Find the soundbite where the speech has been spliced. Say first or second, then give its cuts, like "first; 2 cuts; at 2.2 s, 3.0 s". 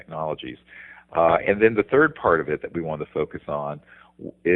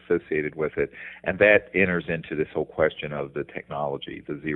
first; 1 cut; at 2.2 s